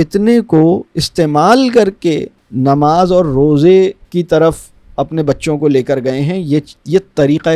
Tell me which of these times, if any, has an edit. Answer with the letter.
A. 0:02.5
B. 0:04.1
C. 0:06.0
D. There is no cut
D